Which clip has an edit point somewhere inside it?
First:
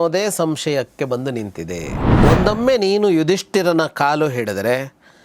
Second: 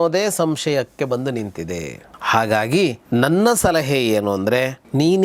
first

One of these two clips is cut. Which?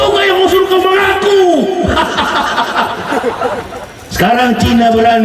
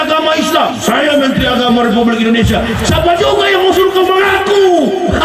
first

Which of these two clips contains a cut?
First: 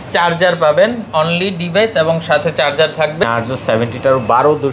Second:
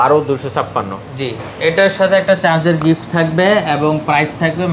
first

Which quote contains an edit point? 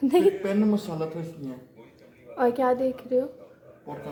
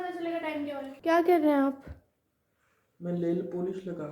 second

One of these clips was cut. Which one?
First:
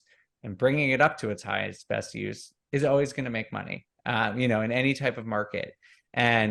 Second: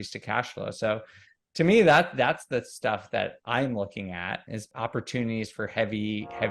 second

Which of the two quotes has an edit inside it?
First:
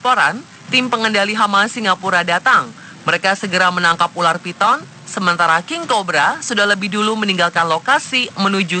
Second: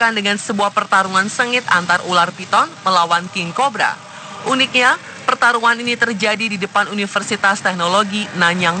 second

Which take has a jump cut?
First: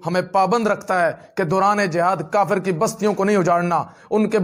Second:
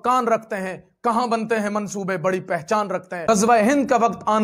second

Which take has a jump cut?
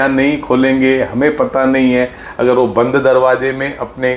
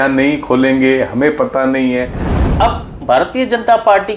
second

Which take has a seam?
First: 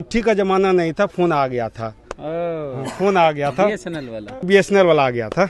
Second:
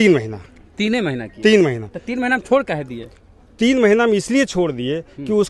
first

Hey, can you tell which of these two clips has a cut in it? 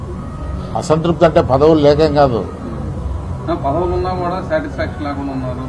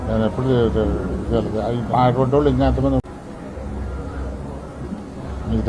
second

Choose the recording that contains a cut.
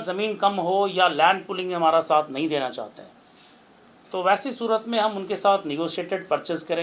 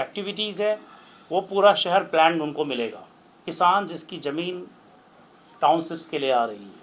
second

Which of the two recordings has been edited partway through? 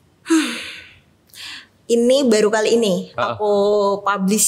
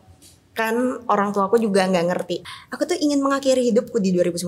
second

